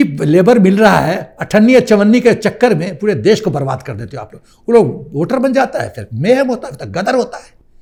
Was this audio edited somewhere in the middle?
no; 0 cuts

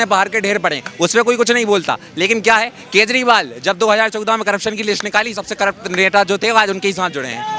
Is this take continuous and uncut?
yes; 0 cuts

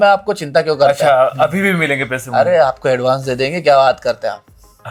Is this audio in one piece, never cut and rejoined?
yes; 0 cuts

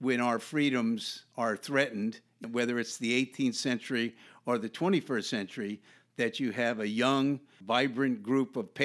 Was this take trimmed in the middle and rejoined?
yes; 1 cut; at 7.5 s

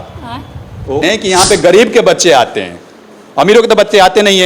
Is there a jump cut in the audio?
yes; 1 cut; at 1.0 s

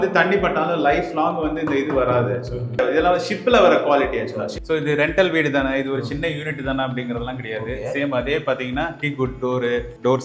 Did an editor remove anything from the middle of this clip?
yes; 2 cuts; at 2.8 s, 4.5 s

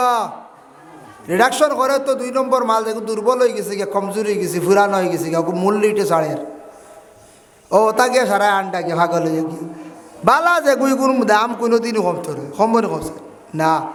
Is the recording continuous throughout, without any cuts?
yes; 0 cuts

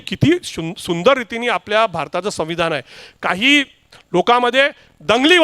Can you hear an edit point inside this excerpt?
yes; 1 cut; at 3.0 s

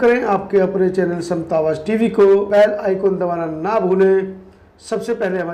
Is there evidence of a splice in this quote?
no; 0 cuts

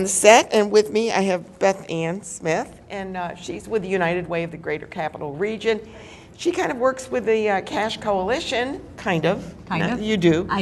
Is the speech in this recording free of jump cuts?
no; 1 cut; at 7.5 s

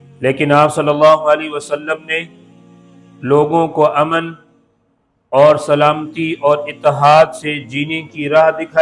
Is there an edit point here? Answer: no; 0 cuts

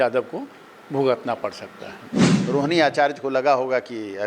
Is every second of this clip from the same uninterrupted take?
no; 1 cut; at 2.3 s

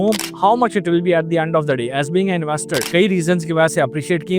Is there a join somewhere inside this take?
yes; 1 cut; at 2.9 s

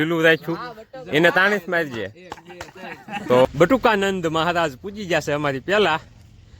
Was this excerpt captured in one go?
no; 1 cut; at 3.4 s

